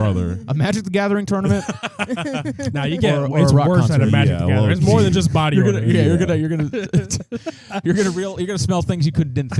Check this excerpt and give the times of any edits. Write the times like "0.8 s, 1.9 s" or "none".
none